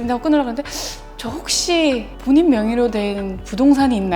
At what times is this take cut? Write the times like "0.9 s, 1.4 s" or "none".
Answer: 2.1 s